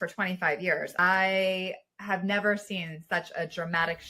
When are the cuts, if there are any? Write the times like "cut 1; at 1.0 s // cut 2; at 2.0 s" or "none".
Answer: cut 1; at 0.9 s